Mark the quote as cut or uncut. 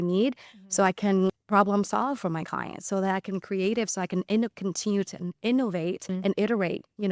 uncut